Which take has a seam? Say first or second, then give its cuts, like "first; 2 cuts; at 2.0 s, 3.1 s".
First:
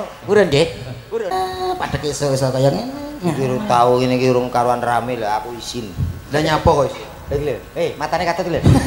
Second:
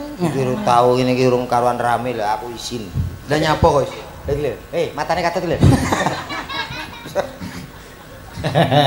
first; 1 cut; at 1.3 s